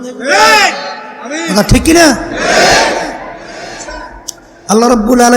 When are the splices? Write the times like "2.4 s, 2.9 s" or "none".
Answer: 3.9 s